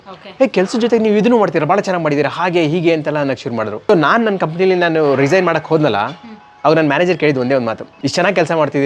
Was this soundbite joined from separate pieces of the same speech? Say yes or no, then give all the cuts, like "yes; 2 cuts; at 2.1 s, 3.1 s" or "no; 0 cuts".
yes; 1 cut; at 3.8 s